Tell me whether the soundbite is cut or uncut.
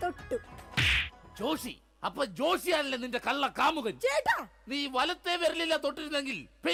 uncut